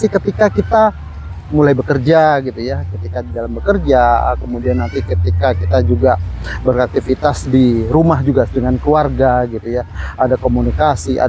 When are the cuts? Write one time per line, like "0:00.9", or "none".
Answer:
none